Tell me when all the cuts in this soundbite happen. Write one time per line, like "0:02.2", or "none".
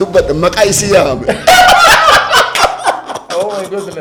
none